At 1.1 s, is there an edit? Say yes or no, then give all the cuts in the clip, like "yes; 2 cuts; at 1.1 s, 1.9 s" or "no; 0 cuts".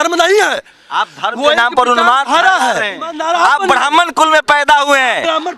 no; 1 cut; at 3.2 s